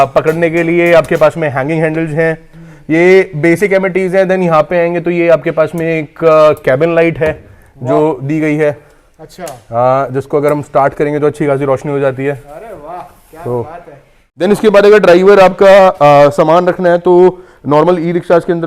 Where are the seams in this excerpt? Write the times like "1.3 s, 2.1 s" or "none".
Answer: 14.2 s